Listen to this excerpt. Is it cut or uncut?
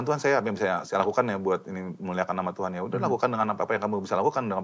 uncut